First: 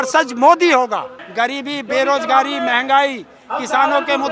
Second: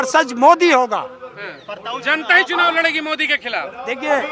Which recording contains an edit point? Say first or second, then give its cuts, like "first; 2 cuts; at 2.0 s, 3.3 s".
first; 1 cut; at 1.2 s